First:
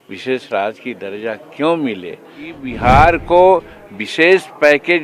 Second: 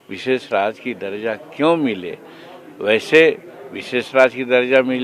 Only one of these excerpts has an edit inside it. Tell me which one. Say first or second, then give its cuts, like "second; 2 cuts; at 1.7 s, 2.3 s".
first; 1 cut; at 2.7 s